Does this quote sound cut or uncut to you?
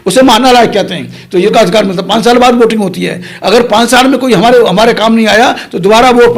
cut